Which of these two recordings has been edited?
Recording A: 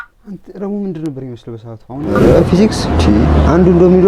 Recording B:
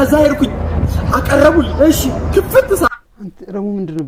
A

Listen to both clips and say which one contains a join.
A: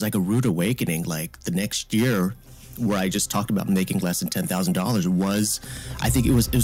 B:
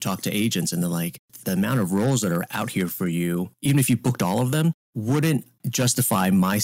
B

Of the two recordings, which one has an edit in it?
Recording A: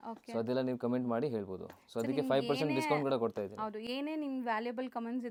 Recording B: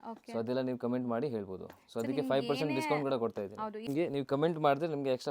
B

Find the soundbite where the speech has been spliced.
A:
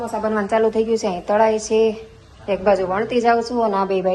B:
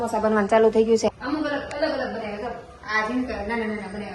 B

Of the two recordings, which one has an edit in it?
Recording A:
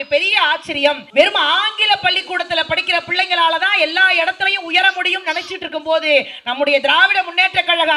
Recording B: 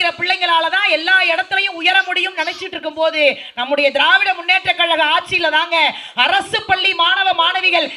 A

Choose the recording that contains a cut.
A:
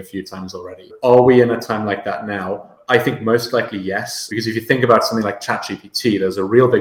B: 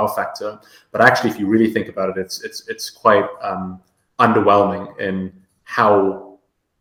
A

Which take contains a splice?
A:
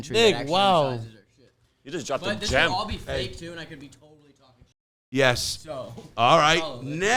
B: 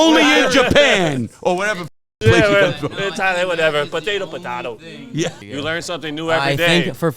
B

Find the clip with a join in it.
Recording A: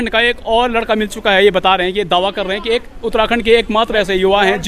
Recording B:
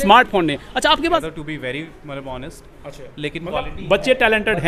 B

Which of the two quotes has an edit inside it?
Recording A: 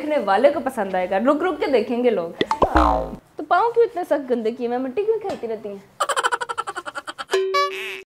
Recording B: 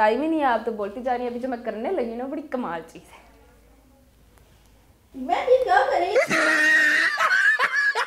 A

